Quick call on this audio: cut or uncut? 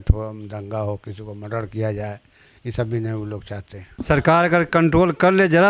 cut